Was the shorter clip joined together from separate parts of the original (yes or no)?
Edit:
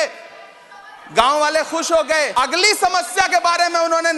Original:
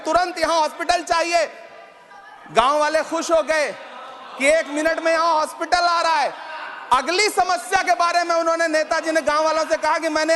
yes